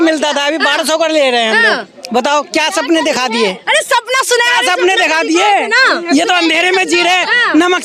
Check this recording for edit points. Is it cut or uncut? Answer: uncut